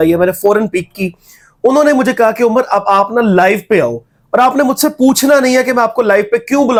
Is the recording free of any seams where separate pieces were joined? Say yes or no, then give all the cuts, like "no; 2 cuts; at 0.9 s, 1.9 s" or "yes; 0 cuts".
yes; 0 cuts